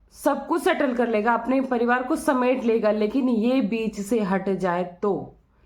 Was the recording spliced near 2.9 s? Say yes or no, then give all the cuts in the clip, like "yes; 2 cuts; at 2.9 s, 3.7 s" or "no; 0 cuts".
no; 0 cuts